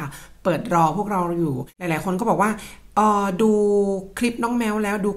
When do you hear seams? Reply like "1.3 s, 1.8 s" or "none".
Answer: 1.7 s